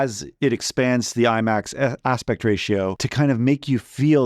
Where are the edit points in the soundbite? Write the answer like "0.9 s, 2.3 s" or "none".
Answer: 3.0 s